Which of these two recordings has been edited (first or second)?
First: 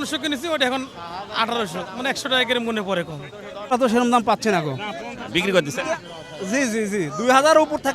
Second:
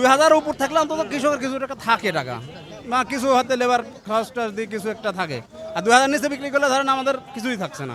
first